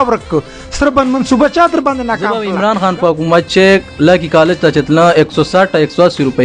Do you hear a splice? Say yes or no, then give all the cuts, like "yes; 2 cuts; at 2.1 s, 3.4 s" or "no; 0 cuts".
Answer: yes; 1 cut; at 2.5 s